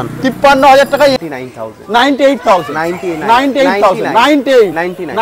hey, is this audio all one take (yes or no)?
no